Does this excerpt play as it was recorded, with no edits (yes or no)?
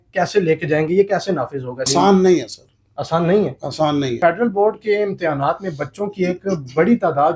no